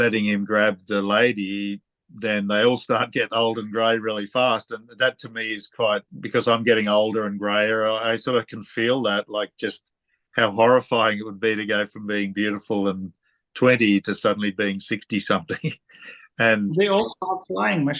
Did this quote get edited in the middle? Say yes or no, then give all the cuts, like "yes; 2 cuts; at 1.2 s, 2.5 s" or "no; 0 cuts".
yes; 1 cut; at 6.1 s